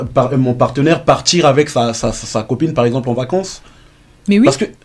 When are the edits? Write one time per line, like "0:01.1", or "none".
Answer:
none